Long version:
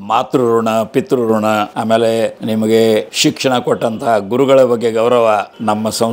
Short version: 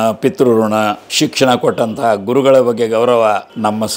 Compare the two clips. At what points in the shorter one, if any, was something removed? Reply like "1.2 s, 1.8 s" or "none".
1.1 s